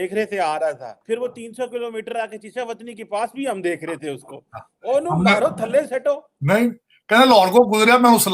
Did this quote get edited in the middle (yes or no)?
yes